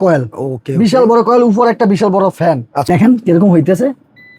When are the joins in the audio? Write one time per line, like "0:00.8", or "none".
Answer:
0:02.3